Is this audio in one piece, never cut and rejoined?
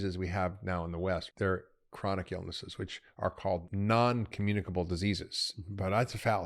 no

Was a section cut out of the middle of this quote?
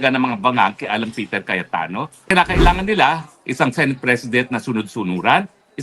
yes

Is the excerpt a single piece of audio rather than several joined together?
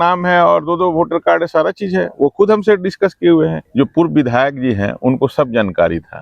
no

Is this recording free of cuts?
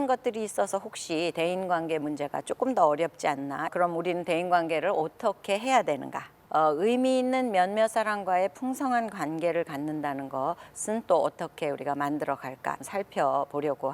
no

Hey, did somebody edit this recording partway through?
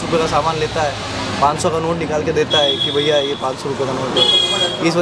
no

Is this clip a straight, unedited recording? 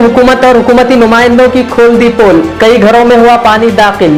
yes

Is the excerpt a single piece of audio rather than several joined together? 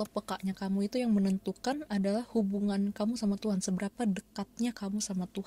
yes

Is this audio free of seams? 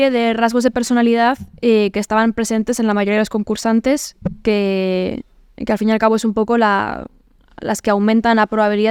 yes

